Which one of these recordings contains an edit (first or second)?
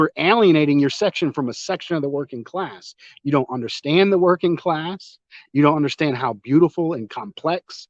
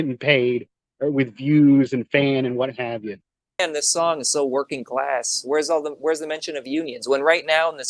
second